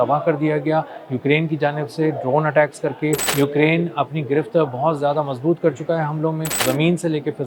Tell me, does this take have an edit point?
yes; 2 cuts; at 3.3 s, 6.6 s

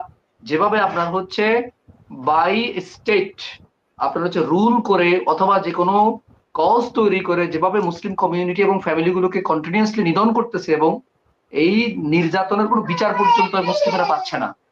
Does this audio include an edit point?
no; 0 cuts

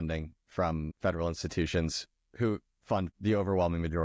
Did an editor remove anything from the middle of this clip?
yes; 2 cuts; at 0.9 s, 3.1 s

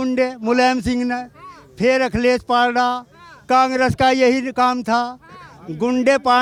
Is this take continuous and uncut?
yes; 0 cuts

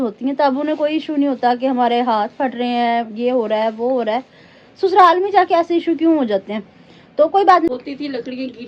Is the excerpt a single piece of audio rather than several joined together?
no; 1 cut; at 7.7 s

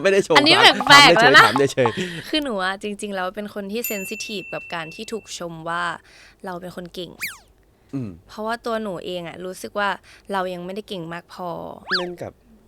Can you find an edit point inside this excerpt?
yes; 2 cuts; at 2.1 s, 11.8 s

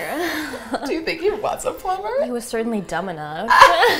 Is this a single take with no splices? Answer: yes; 0 cuts

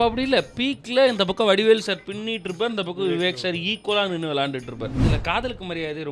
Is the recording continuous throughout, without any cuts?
no; 1 cut; at 5.0 s

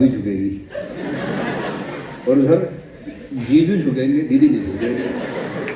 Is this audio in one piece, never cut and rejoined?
yes; 0 cuts

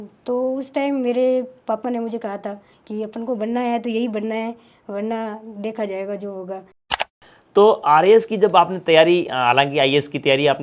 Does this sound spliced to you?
yes; 1 cut; at 6.7 s

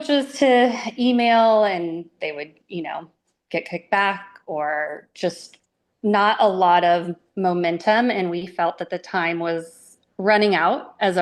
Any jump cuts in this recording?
no; 0 cuts

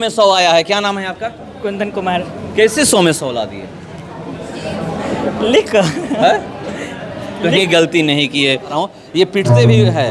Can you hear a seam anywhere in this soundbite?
yes; 1 cut; at 8.7 s

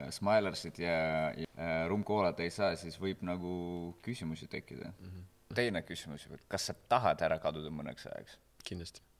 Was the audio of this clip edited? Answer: yes; 2 cuts; at 1.4 s, 5.5 s

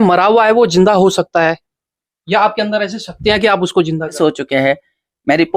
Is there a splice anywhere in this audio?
yes; 1 cut; at 4.2 s

